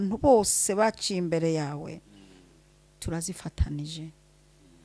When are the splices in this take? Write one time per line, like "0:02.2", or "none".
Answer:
none